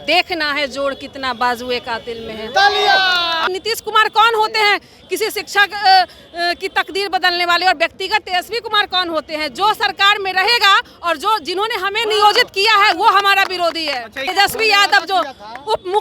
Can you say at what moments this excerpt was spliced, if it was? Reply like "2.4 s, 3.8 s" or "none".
3.4 s, 14.2 s